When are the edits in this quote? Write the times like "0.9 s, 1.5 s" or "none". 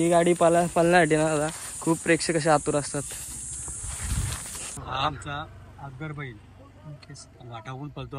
4.8 s